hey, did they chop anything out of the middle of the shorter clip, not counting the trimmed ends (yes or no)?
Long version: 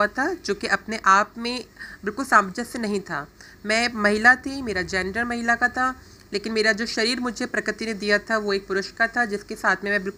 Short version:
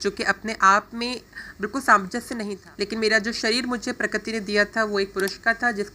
yes